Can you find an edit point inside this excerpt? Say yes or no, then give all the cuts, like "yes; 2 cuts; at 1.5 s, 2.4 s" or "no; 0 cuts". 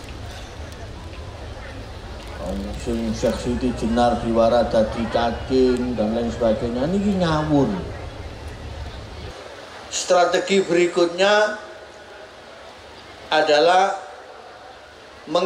yes; 1 cut; at 9.3 s